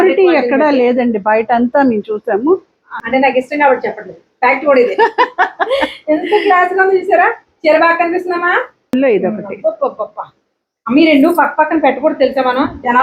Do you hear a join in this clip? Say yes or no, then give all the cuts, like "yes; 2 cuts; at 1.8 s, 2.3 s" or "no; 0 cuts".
yes; 2 cuts; at 3.0 s, 8.9 s